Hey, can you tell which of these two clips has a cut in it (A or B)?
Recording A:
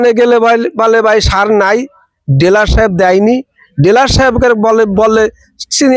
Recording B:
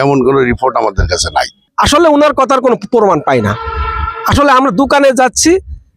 B